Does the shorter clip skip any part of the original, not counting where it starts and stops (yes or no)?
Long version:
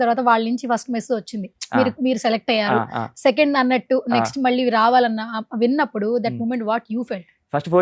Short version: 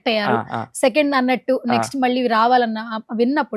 no